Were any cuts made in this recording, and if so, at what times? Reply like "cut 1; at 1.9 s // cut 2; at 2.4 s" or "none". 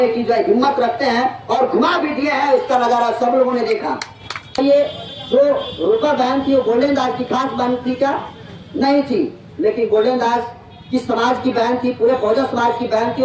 cut 1; at 4.6 s